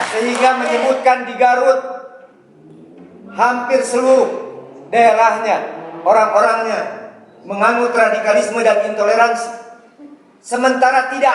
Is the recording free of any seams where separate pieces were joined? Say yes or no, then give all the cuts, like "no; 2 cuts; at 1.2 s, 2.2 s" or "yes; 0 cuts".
yes; 0 cuts